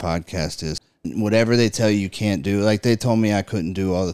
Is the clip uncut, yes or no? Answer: no